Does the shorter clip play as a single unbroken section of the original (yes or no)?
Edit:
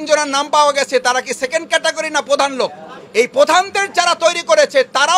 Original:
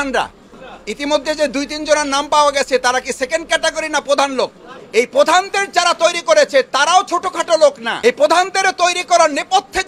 yes